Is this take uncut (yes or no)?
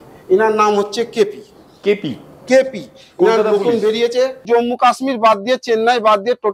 no